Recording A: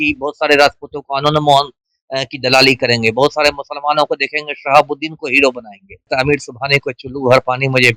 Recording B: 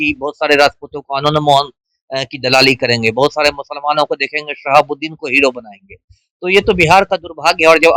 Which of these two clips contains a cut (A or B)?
A